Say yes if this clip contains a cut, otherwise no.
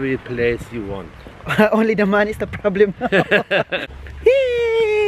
yes